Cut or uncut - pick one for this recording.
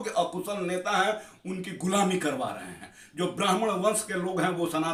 uncut